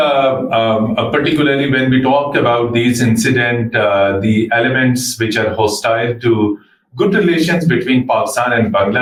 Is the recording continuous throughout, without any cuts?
yes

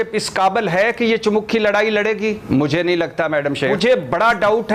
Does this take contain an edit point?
no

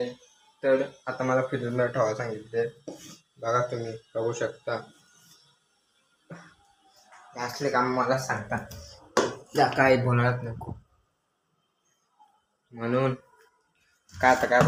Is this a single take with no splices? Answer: yes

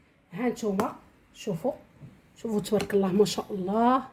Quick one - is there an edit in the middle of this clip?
no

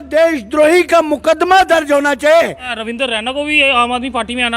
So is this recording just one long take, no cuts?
no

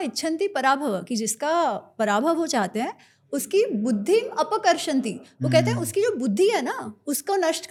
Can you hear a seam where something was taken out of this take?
no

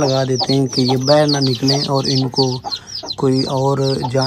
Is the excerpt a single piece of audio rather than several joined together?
yes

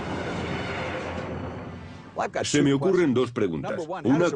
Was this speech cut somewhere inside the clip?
no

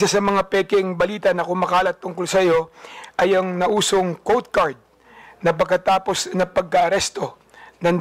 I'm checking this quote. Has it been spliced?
no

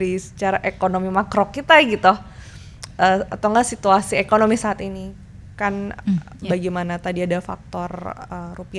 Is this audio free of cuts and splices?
yes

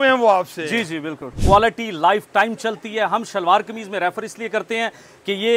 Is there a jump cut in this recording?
yes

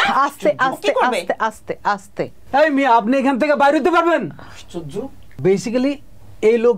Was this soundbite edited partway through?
yes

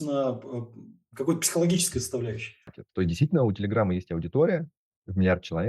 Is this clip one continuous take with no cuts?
no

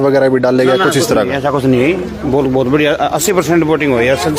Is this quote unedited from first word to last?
yes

